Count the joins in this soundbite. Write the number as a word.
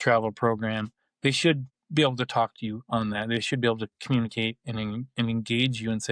one